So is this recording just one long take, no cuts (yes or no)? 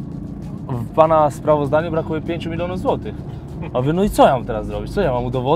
yes